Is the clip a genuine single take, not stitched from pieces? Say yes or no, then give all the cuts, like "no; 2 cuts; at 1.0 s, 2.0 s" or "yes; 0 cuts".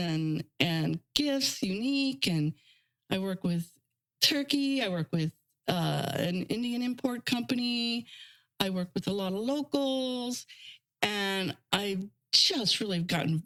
yes; 0 cuts